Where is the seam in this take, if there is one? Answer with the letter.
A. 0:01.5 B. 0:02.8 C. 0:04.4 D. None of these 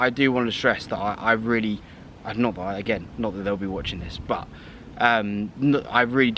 B